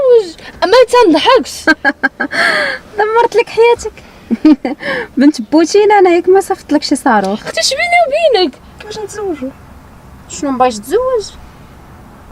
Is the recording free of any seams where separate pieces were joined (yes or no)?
no